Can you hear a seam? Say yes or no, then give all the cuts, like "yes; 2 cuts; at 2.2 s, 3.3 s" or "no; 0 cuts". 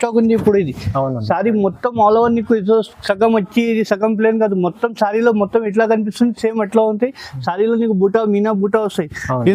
no; 0 cuts